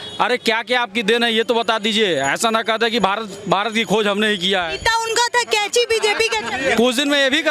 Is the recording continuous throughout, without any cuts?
yes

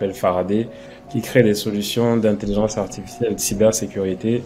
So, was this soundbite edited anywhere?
no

